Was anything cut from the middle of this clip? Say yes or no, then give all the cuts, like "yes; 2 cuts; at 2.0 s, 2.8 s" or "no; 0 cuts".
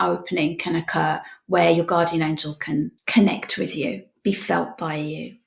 yes; 1 cut; at 3.0 s